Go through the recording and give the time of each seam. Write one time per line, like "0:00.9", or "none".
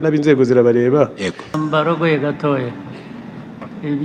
0:01.5